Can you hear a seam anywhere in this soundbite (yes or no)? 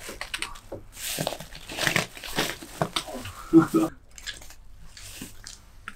yes